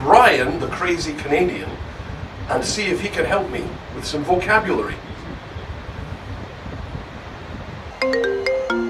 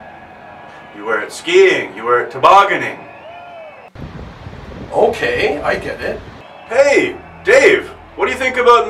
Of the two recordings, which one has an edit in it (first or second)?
first